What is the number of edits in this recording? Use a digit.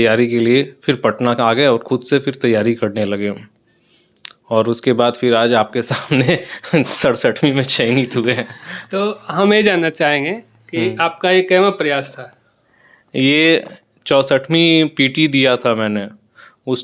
0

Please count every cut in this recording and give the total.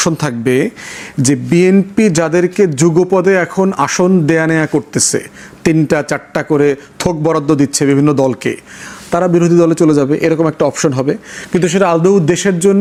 0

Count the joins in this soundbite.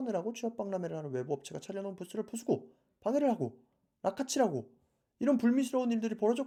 0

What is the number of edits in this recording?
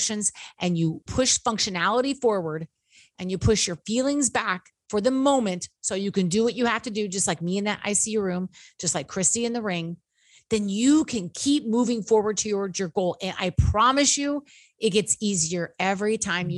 1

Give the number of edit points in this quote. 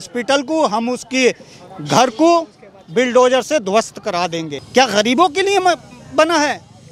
1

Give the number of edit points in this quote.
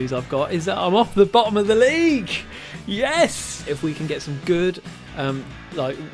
1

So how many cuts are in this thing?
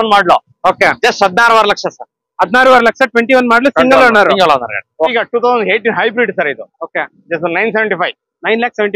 1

